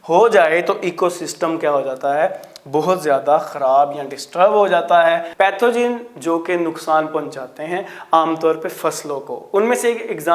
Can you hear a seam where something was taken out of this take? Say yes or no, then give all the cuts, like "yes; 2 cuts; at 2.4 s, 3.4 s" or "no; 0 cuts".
yes; 1 cut; at 5.3 s